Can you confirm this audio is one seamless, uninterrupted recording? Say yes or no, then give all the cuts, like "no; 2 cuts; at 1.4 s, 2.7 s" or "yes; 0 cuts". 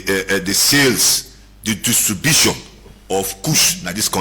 no; 2 cuts; at 1.2 s, 2.8 s